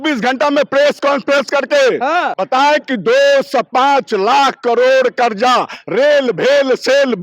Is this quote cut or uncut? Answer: cut